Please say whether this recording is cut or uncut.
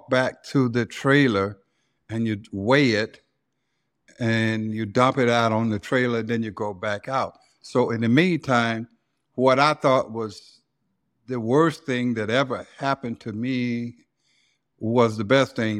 uncut